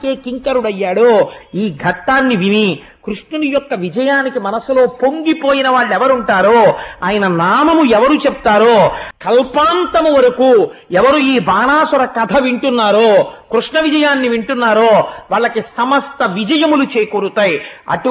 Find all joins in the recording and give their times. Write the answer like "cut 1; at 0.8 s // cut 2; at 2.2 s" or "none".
cut 1; at 9.0 s